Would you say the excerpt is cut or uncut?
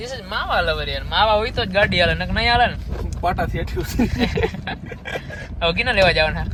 uncut